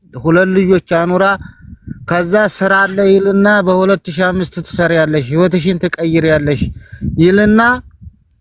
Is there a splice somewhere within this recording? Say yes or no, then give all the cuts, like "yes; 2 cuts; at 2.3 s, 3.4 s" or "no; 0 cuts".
no; 0 cuts